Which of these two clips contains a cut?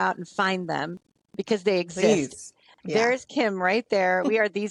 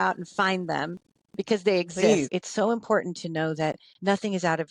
second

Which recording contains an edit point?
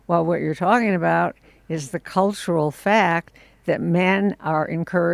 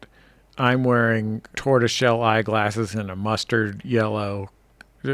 second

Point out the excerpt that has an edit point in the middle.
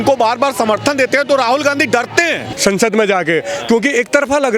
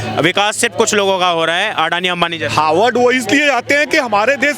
first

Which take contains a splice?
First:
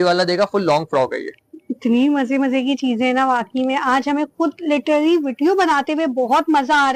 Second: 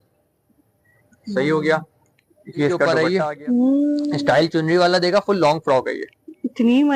second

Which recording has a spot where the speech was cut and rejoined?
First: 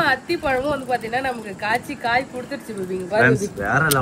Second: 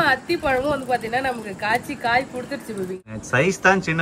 second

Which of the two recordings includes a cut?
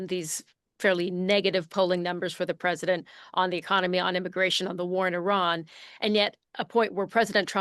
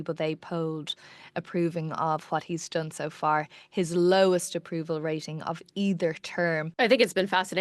second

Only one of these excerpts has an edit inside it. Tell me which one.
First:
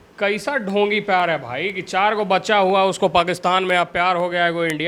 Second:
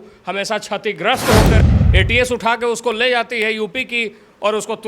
second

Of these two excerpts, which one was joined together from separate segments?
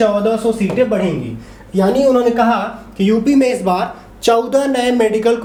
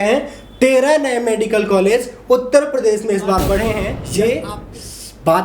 second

